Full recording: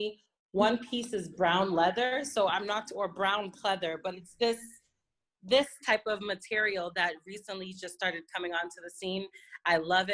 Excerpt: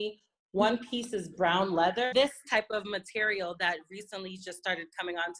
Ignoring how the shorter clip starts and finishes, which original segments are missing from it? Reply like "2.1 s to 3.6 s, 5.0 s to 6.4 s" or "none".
2.1 s to 5.5 s